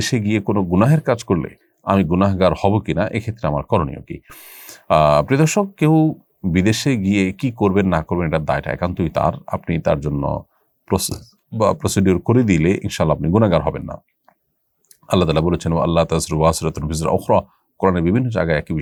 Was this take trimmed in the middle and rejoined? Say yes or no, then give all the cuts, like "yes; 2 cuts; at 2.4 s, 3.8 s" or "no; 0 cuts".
no; 0 cuts